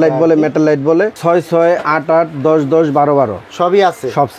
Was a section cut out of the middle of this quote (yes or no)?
yes